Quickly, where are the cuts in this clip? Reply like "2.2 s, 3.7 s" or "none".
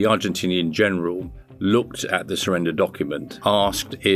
3.2 s